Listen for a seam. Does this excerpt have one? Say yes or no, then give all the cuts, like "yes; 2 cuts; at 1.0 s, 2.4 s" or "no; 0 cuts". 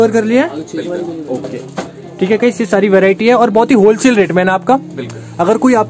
no; 0 cuts